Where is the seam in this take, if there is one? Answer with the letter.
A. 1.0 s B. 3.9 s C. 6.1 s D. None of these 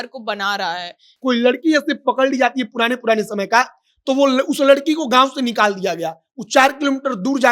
A